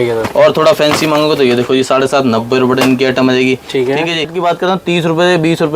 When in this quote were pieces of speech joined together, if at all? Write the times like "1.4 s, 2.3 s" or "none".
4.3 s